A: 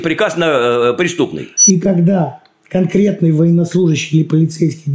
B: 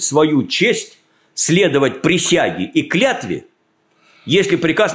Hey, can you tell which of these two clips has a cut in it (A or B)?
A